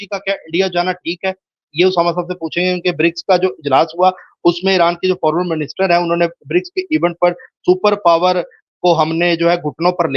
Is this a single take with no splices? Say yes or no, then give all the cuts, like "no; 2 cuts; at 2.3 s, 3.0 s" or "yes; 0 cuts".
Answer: yes; 0 cuts